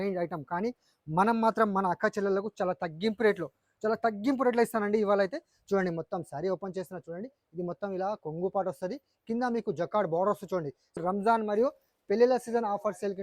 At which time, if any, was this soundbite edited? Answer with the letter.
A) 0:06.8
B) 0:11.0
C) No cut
B